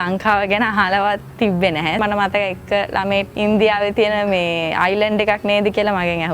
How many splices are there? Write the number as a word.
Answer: two